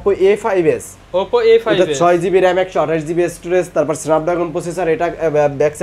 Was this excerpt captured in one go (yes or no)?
yes